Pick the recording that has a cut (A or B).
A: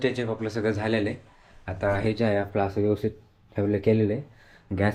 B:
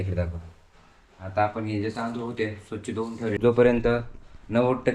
B